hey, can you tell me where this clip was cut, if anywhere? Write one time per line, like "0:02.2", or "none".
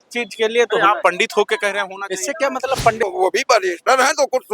0:03.0